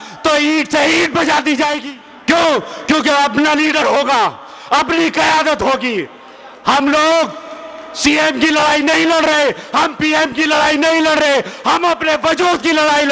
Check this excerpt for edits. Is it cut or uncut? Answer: cut